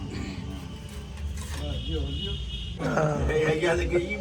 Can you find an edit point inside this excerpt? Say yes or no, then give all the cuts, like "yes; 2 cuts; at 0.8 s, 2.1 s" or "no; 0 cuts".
yes; 1 cut; at 2.8 s